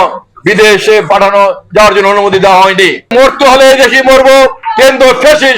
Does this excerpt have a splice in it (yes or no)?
yes